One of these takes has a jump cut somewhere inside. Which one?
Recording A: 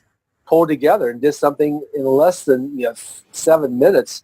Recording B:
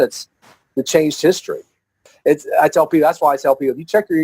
B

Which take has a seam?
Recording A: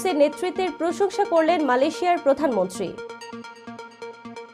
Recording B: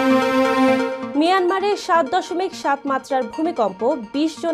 B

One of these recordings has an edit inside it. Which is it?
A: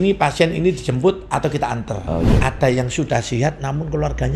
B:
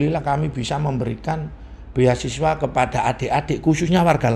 A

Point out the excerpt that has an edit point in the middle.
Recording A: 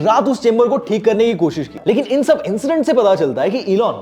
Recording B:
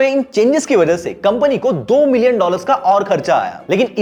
A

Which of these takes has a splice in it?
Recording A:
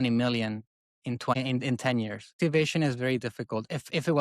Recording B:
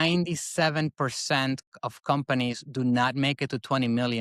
A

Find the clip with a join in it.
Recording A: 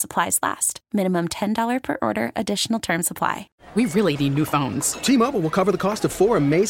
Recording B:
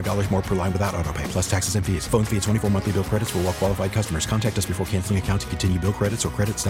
A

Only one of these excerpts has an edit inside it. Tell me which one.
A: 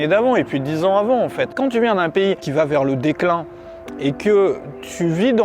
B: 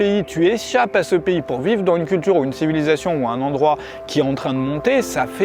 A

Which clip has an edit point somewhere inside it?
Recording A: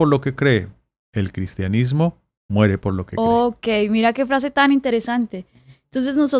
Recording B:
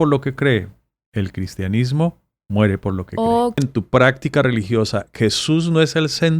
B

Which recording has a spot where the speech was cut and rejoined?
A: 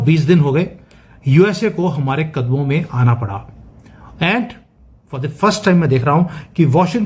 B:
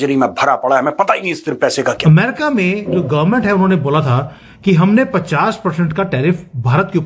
B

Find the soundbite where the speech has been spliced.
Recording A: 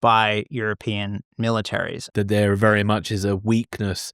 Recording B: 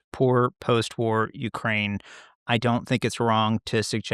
A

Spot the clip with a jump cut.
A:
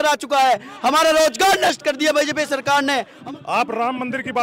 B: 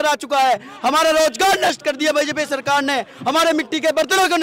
A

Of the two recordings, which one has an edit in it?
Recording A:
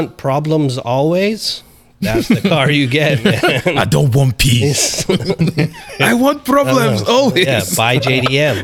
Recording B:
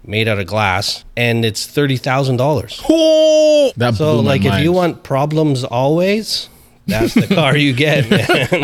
B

